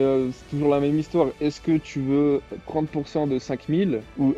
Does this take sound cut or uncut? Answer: uncut